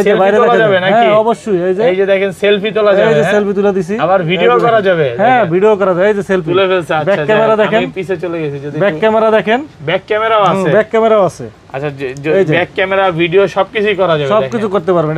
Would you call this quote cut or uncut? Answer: uncut